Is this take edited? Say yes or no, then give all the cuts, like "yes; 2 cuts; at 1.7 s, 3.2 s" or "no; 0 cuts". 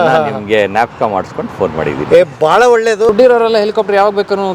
yes; 1 cut; at 3.1 s